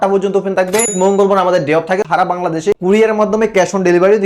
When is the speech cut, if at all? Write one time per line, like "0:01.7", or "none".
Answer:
0:00.9
0:02.0